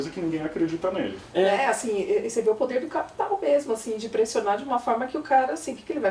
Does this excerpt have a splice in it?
yes; 1 cut; at 1.2 s

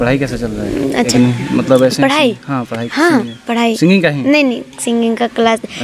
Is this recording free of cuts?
no; 1 cut; at 1.1 s

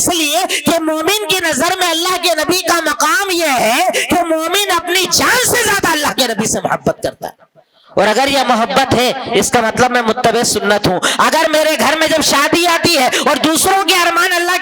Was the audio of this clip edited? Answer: no; 0 cuts

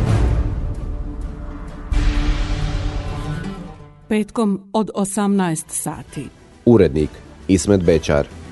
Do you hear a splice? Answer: no; 0 cuts

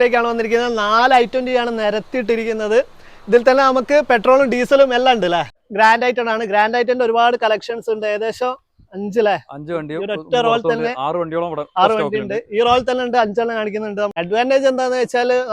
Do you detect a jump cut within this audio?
yes; 2 cuts; at 5.6 s, 14.1 s

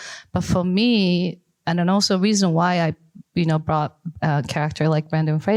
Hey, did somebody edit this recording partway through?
no; 0 cuts

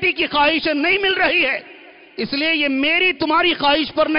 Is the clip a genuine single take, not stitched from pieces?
yes; 0 cuts

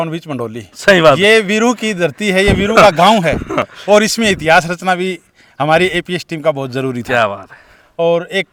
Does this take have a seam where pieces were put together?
no; 0 cuts

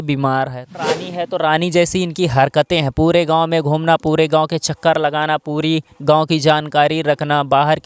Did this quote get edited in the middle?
yes; 1 cut; at 1.0 s

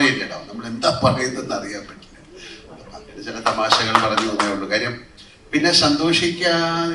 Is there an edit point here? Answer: no; 0 cuts

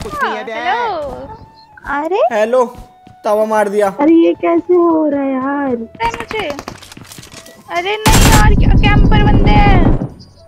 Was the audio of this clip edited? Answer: yes; 1 cut; at 6.0 s

